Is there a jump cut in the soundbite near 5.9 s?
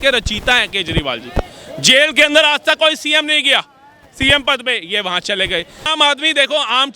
yes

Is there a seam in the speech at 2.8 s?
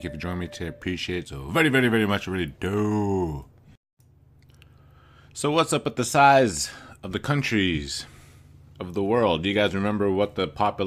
no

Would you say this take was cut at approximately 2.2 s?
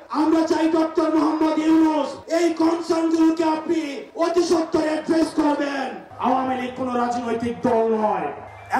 no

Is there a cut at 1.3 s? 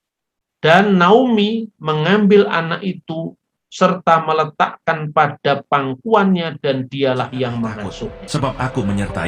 no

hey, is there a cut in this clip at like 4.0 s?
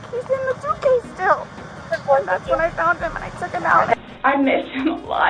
yes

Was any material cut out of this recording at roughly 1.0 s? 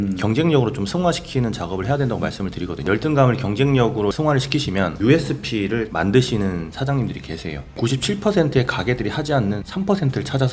no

